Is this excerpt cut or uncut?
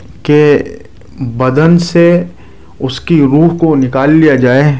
uncut